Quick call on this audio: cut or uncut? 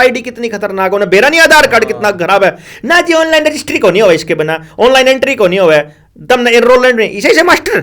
uncut